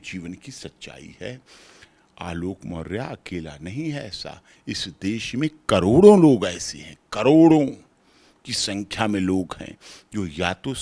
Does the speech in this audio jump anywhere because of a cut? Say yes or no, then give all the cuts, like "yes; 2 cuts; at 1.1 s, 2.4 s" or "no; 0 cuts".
no; 0 cuts